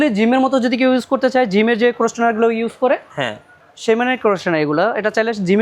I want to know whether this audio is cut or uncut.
uncut